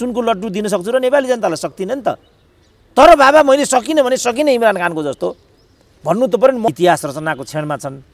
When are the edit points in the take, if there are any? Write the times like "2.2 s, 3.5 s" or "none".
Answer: 6.7 s